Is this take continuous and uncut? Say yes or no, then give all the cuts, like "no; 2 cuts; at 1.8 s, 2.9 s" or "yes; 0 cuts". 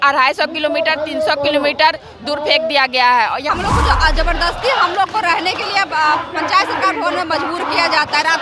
no; 1 cut; at 3.5 s